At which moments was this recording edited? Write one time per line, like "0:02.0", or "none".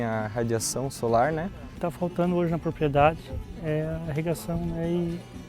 0:01.7